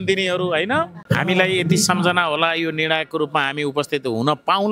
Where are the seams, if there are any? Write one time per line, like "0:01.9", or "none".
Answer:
0:01.0